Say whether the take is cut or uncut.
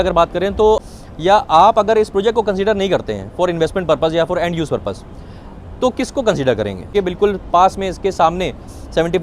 cut